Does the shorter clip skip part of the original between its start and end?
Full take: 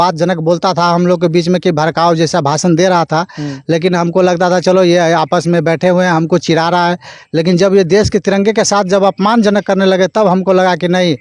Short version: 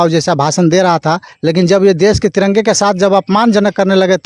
yes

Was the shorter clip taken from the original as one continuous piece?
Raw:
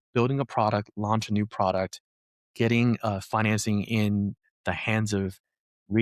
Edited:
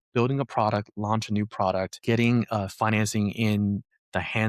no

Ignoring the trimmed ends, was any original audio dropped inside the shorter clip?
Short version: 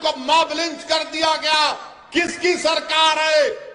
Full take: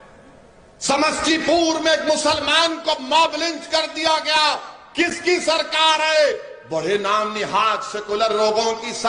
no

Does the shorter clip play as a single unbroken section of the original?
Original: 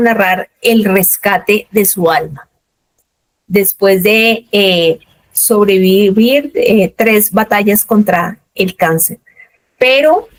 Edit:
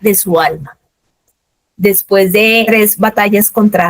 no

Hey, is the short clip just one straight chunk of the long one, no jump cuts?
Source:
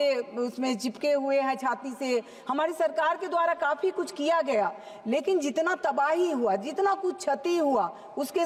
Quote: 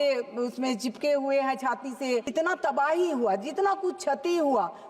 no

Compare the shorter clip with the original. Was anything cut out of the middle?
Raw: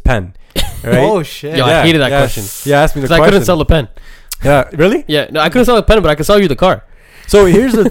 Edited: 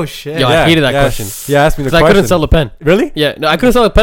yes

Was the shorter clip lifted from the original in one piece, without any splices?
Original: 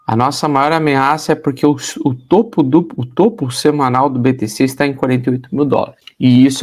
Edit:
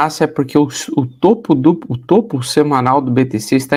yes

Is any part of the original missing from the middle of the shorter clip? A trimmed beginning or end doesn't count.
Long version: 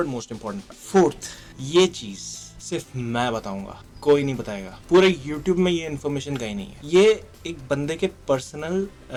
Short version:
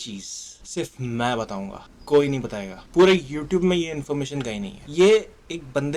no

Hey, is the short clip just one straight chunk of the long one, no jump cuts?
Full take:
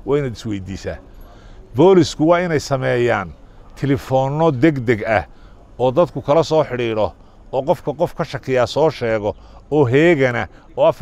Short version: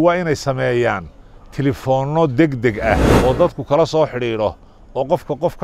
no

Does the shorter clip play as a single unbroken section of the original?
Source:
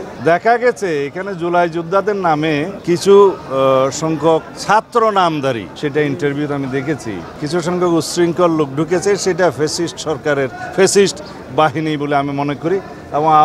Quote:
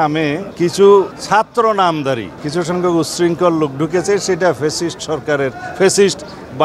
no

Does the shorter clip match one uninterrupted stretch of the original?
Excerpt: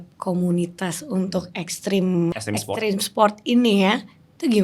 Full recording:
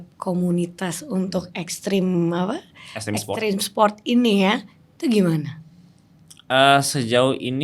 no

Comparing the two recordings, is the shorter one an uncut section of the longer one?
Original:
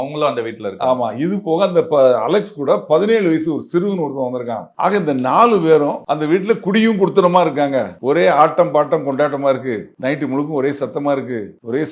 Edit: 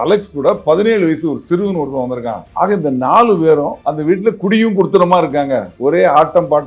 yes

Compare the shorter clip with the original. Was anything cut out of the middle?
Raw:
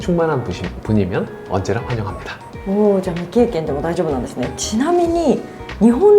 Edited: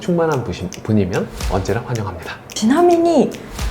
yes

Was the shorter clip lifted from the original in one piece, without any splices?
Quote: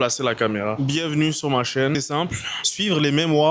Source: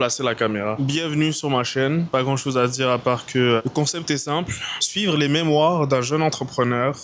no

